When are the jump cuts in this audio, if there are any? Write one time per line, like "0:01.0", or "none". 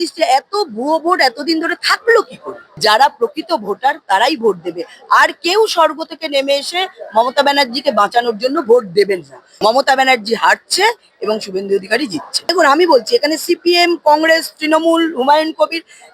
0:02.8
0:09.4
0:12.5